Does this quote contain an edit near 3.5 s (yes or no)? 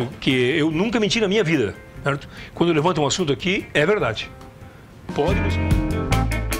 no